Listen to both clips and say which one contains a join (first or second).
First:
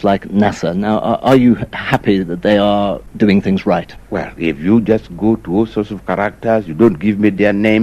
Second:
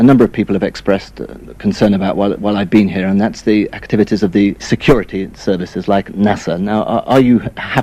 first